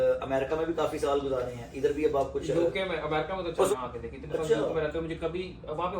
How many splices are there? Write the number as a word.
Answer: one